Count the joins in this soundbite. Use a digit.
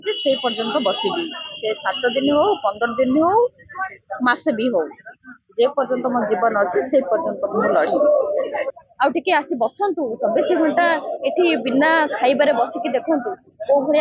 1